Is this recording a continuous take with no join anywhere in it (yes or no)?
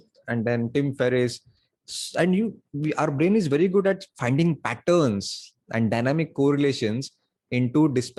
yes